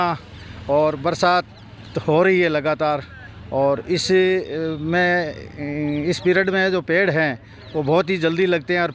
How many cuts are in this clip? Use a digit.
0